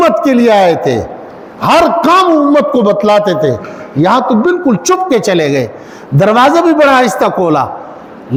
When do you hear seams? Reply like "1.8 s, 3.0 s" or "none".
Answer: none